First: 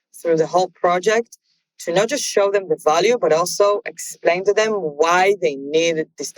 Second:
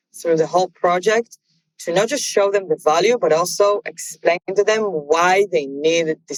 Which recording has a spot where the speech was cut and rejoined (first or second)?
first